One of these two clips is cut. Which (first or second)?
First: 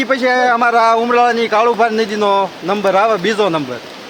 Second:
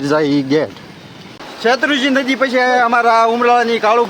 second